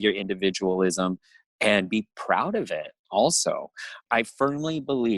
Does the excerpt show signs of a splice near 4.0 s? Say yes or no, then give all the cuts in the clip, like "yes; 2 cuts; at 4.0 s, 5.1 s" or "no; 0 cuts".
yes; 1 cut; at 4.0 s